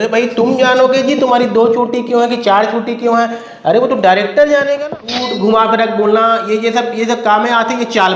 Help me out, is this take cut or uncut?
cut